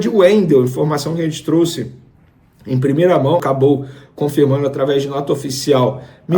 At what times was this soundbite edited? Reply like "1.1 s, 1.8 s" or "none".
3.4 s

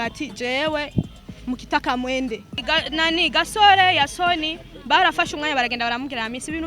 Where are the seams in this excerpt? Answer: 2.6 s

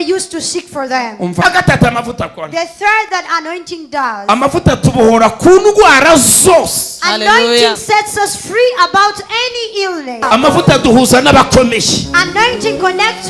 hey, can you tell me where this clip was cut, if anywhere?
1.4 s, 10.2 s

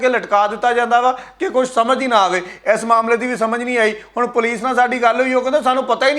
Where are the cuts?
none

